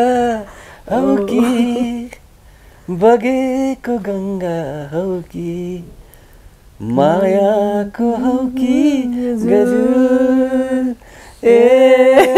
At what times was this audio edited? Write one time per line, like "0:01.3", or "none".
none